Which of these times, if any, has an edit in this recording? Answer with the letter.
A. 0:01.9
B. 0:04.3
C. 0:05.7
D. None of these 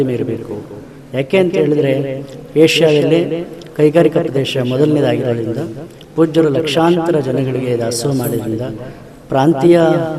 D